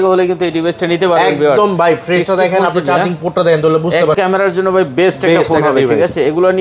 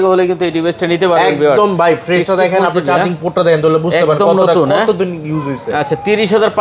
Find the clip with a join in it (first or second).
first